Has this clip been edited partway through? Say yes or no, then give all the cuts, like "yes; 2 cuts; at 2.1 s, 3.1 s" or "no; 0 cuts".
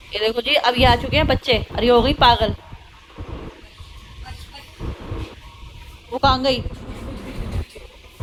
no; 0 cuts